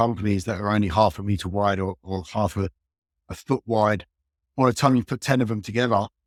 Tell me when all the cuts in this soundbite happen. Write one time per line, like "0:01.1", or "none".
none